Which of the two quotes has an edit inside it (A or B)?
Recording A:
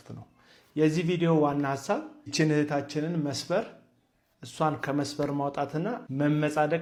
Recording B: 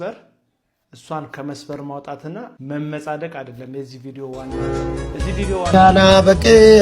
B